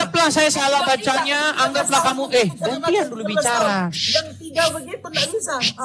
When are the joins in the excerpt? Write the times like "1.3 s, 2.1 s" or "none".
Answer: none